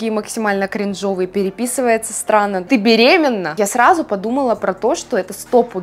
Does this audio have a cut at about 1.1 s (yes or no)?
no